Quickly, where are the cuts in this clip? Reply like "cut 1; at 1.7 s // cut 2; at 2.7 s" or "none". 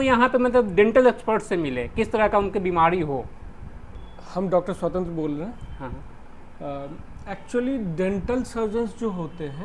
none